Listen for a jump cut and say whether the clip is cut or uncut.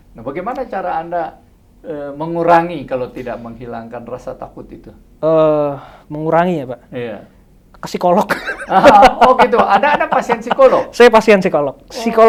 uncut